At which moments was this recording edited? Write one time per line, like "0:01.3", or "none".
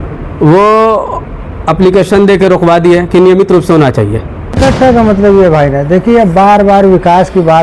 0:04.6